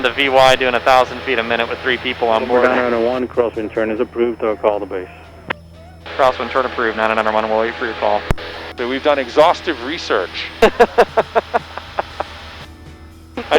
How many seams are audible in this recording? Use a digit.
1